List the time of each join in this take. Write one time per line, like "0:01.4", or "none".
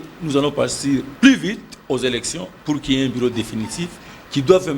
0:01.1